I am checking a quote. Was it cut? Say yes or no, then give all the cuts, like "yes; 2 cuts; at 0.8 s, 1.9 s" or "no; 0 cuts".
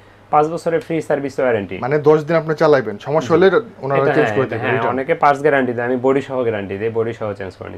no; 0 cuts